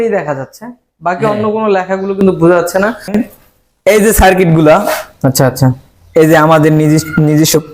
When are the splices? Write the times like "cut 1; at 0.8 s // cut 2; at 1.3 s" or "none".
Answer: cut 1; at 3.1 s